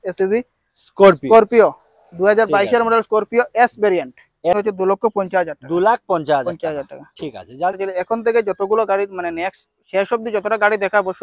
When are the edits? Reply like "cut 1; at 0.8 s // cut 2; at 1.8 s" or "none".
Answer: cut 1; at 4.5 s // cut 2; at 7.7 s